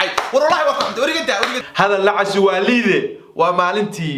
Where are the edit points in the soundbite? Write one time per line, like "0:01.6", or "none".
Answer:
0:01.6